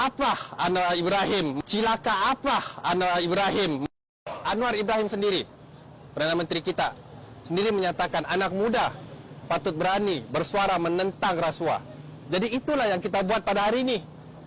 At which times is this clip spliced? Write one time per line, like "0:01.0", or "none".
0:01.6
0:03.7